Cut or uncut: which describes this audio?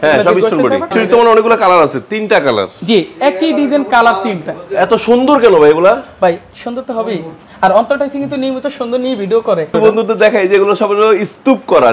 cut